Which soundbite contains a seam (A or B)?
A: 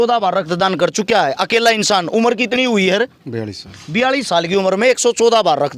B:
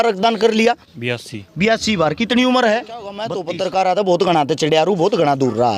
B